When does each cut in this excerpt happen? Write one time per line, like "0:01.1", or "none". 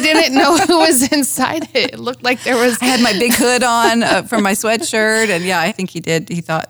0:05.7

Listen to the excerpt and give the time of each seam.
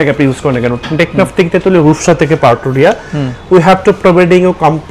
none

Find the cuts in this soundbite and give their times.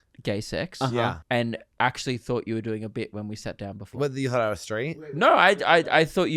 0:01.2
0:03.9

